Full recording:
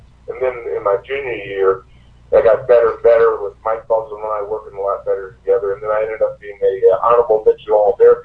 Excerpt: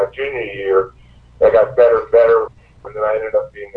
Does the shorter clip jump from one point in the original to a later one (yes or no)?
yes